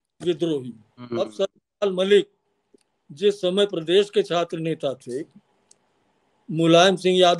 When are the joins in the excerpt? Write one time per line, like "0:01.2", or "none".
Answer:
0:01.1